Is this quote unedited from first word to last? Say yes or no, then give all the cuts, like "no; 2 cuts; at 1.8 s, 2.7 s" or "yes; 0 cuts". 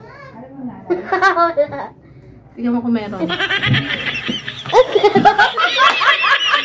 yes; 0 cuts